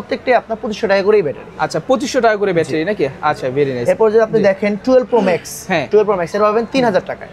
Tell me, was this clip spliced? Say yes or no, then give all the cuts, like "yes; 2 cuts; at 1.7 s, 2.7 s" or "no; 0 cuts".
no; 0 cuts